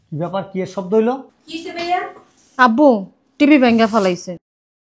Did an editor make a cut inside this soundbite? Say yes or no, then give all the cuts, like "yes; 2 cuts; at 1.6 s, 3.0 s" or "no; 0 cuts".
no; 0 cuts